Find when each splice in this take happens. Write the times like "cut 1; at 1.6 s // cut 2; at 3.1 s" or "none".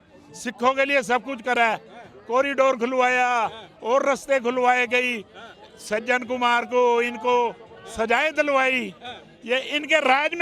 none